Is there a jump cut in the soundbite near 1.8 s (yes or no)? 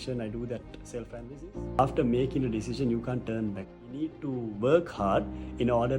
yes